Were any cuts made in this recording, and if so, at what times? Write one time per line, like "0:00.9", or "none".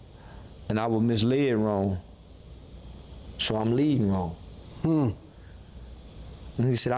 none